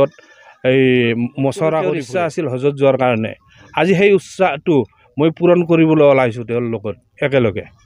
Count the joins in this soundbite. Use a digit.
1